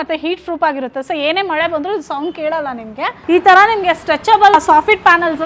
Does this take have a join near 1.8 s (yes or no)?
no